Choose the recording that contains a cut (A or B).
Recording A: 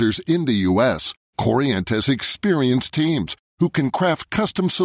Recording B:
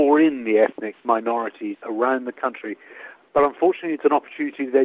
B